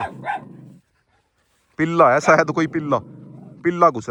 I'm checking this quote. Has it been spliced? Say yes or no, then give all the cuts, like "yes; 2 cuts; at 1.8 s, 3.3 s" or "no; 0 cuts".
no; 0 cuts